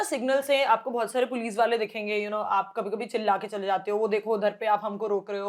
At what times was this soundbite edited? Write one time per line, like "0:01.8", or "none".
none